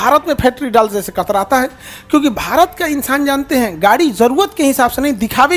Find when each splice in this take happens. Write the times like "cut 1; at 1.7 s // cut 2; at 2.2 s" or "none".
none